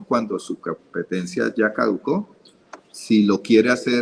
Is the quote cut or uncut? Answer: uncut